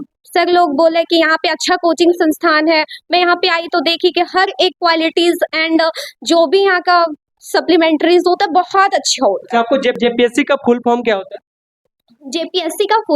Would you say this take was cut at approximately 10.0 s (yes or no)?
yes